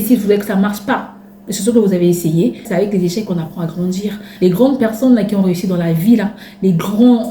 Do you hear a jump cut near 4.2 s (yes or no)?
yes